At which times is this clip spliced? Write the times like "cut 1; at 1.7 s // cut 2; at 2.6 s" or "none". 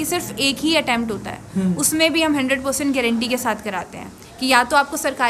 none